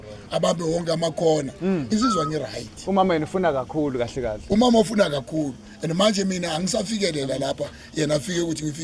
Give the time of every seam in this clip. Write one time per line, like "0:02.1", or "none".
0:01.9

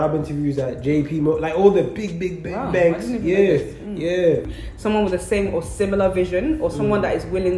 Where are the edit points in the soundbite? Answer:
0:04.6

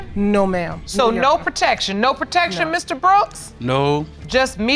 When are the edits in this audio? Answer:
none

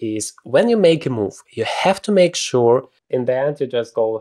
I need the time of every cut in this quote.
0:03.0

